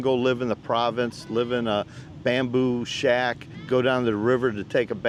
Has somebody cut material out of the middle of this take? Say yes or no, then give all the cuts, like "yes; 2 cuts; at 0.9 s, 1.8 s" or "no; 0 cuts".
no; 0 cuts